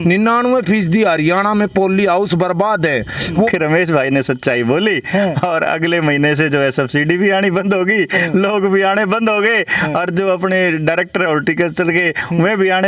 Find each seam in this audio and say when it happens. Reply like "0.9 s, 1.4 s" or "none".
3.5 s